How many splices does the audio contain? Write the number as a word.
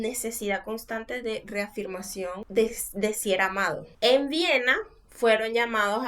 two